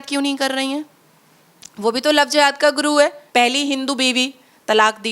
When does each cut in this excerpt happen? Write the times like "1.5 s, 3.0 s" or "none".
3.2 s